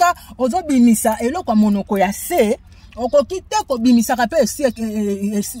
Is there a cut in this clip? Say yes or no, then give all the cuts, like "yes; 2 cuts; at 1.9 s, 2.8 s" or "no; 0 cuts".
no; 0 cuts